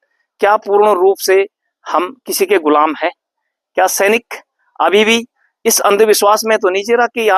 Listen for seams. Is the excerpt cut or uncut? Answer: uncut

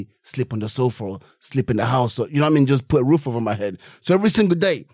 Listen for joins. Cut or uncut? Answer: uncut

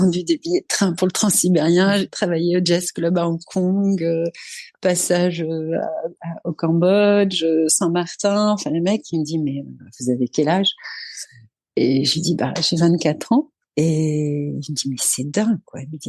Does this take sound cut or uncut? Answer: cut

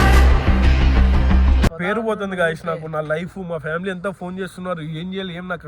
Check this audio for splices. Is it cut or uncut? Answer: cut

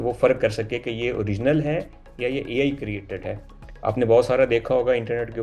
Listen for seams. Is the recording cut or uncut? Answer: uncut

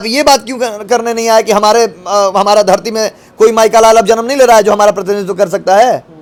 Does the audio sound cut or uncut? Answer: uncut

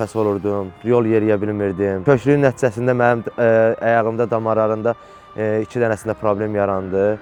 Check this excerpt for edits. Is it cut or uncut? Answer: uncut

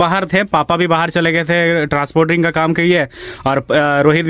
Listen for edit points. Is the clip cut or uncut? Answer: uncut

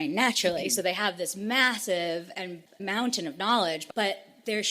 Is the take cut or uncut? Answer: cut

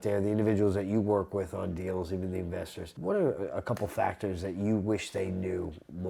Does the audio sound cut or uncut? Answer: cut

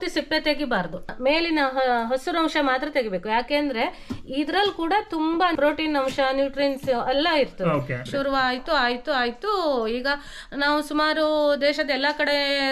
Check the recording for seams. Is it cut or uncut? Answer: cut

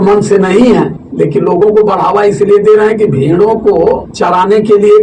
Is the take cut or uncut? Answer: cut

